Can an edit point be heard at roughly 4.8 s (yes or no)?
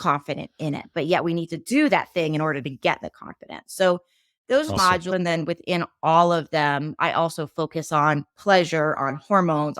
yes